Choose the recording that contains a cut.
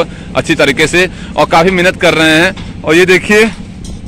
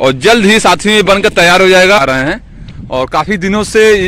second; 1 cut; at 2.0 s

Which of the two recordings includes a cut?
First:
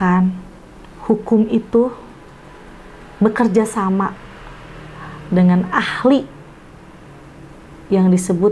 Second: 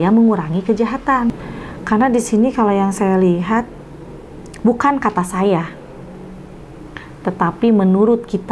second; 1 cut; at 1.3 s

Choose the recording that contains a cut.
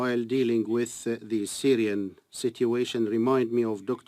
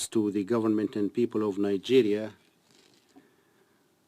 first; 1 cut; at 1.9 s

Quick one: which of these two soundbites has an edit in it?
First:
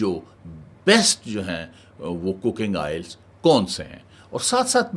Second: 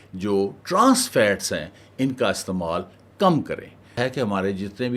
second; 1 cut; at 4.0 s

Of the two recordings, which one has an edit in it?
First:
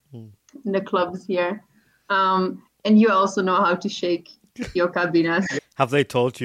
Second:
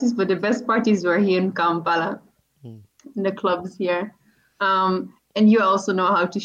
first; 1 cut; at 5.5 s

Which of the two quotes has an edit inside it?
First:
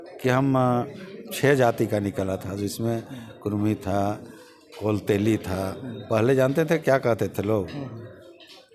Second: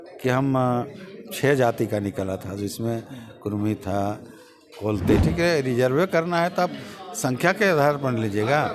second; 1 cut; at 5.2 s

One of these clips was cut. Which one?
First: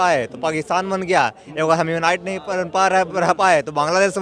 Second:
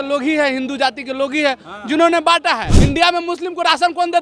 second; 1 cut; at 2.7 s

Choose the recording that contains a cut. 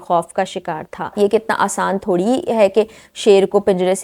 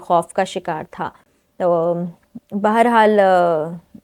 first; 1 cut; at 1.1 s

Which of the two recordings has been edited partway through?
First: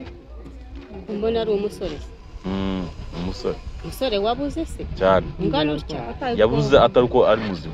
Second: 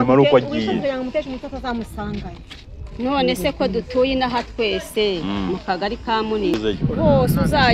second; 1 cut; at 6.5 s

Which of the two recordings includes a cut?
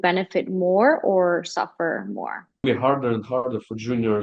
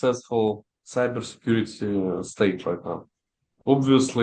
first; 1 cut; at 2.6 s

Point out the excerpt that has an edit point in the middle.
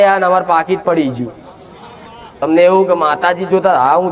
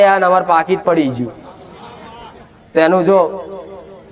first; 1 cut; at 2.4 s

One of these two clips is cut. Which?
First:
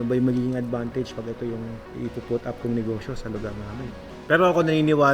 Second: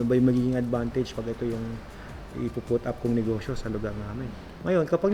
first; 2 cuts; at 1.8 s, 4.1 s

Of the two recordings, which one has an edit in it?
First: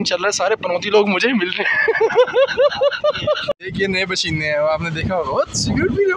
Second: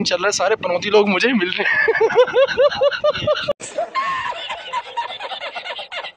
first; 1 cut; at 3.6 s

